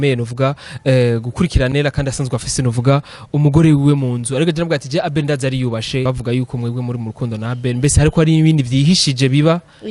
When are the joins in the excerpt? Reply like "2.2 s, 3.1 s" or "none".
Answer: 6.0 s